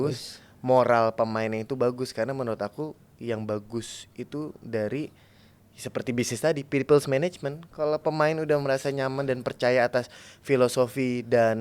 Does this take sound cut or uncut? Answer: uncut